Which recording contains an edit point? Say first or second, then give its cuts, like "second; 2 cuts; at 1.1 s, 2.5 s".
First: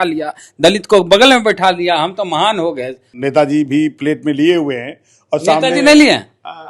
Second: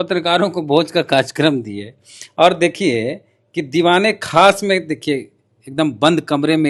first; 1 cut; at 3.0 s